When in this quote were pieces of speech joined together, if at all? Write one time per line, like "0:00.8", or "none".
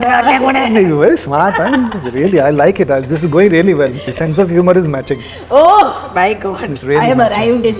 0:04.1